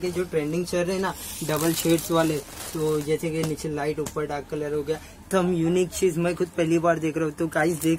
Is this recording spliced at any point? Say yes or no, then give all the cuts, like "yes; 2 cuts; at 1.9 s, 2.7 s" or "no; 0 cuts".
yes; 1 cut; at 5.2 s